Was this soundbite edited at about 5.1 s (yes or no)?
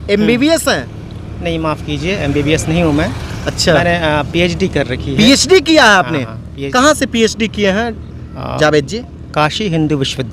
no